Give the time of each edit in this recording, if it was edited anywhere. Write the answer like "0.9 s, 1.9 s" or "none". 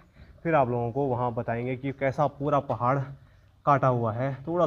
none